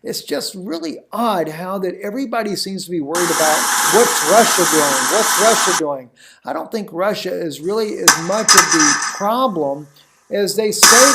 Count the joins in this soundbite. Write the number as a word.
one